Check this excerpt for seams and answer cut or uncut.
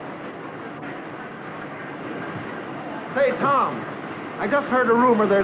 uncut